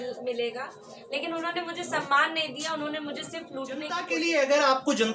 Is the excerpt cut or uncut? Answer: cut